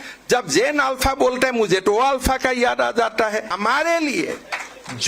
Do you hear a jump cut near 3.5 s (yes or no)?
yes